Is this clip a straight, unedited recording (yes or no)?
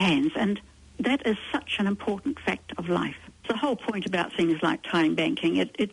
no